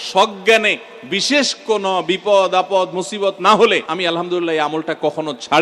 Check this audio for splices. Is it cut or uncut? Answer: cut